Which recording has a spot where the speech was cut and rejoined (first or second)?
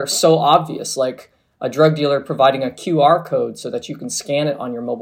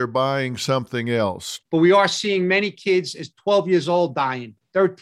second